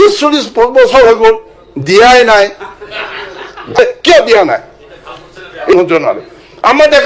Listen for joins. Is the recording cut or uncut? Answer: cut